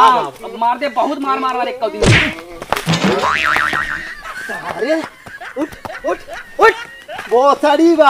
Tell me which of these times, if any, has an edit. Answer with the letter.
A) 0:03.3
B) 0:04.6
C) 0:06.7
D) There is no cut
A